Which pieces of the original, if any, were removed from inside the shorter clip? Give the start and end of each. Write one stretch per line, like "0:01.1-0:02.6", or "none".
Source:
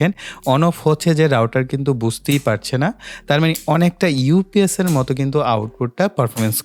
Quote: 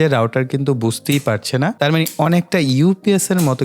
0:02.9-0:03.2

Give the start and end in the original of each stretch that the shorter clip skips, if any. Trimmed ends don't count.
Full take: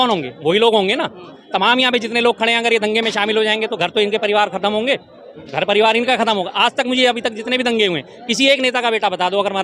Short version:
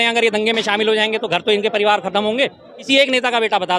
0:05.2-0:08.2

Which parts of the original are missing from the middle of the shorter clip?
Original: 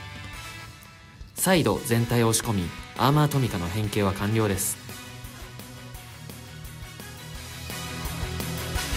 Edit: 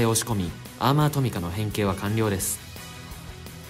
0:04.7-0:07.5

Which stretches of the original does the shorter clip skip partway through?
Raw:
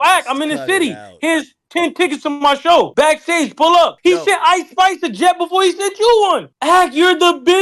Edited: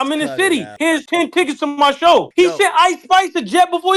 0:01.1-0:01.5
0:02.9-0:03.9

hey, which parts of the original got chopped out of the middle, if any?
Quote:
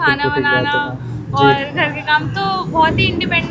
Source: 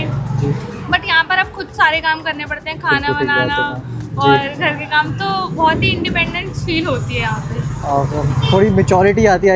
none

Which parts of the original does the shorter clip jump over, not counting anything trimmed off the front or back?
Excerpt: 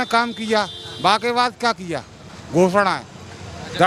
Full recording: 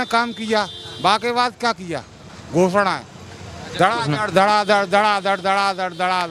none

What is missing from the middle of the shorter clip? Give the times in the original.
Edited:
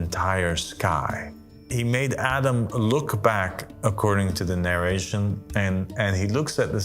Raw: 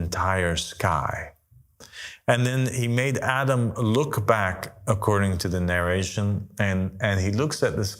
0:01.7-0:02.8

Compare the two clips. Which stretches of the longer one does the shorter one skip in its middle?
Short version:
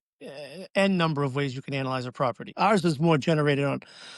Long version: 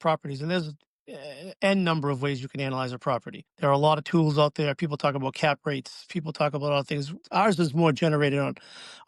0:03.3-0:07.2

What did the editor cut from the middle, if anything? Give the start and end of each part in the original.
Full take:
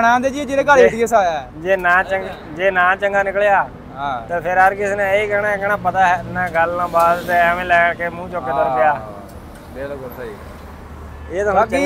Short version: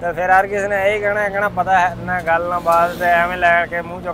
none

